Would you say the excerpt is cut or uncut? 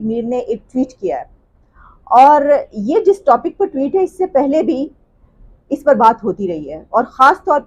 uncut